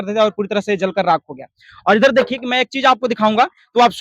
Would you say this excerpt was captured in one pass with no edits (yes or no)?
yes